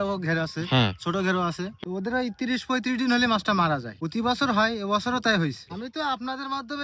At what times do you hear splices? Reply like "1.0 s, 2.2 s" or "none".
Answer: 1.7 s, 3.9 s, 5.7 s